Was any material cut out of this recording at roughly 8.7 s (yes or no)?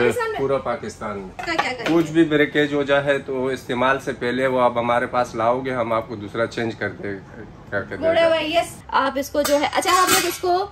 yes